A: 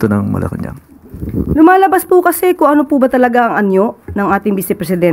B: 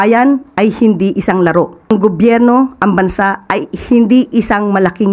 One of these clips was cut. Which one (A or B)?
B